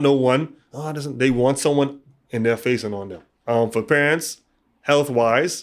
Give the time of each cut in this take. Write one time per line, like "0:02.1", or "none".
0:03.2